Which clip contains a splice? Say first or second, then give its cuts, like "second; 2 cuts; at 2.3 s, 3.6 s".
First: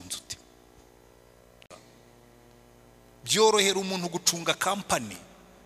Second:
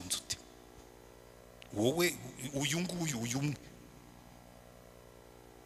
first; 1 cut; at 1.6 s